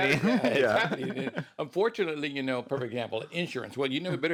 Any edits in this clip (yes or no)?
no